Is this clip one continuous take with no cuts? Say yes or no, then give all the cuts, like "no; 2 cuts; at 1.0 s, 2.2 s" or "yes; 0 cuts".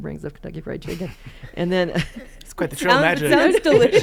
yes; 0 cuts